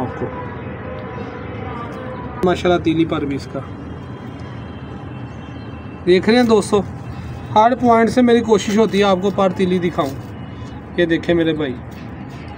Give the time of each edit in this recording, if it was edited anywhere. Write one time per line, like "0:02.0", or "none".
none